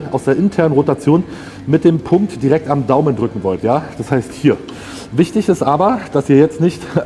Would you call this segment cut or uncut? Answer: uncut